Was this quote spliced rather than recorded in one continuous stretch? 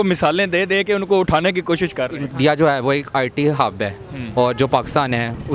yes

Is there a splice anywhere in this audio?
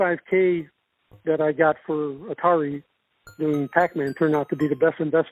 no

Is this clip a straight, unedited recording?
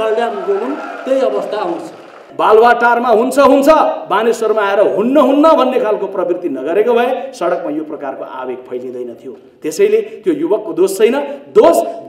no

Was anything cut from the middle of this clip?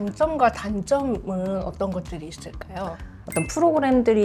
yes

